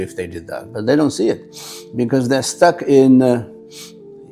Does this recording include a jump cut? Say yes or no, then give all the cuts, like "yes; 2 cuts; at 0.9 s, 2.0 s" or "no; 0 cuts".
no; 0 cuts